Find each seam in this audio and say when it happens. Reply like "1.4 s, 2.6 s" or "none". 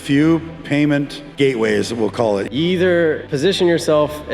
1.2 s, 2.5 s, 3.3 s